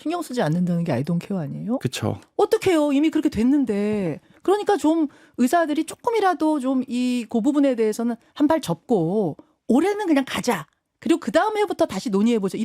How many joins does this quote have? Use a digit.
1